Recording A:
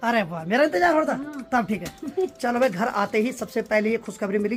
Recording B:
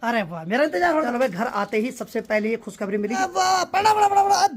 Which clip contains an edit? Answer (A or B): B